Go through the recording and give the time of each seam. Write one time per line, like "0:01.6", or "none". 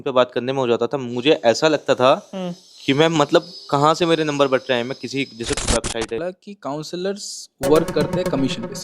0:06.2